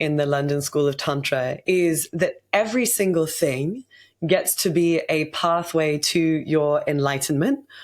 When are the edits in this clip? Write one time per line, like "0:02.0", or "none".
0:01.5